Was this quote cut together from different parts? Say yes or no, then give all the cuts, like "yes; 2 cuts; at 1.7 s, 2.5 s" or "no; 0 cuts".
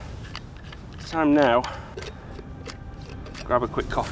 yes; 1 cut; at 1.9 s